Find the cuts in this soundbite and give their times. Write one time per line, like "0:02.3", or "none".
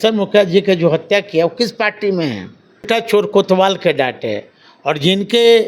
0:02.9